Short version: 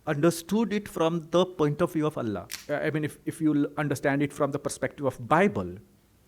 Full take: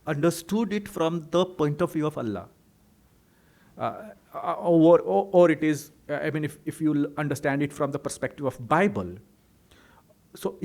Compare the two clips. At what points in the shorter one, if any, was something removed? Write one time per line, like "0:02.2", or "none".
0:02.5